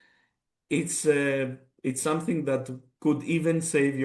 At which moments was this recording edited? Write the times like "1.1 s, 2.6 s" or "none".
none